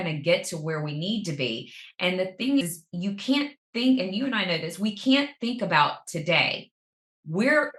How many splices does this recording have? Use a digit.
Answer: 0